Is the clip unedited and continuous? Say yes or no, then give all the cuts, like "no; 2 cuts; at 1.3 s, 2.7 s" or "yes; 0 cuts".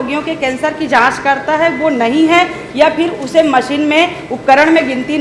yes; 0 cuts